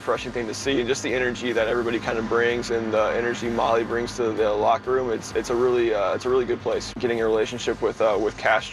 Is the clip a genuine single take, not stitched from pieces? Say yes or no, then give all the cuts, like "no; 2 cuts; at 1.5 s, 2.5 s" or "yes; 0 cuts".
no; 1 cut; at 6.9 s